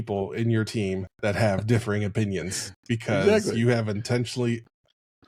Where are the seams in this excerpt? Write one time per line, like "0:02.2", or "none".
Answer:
none